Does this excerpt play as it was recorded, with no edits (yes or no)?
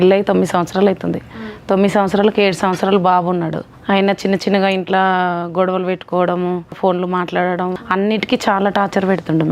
no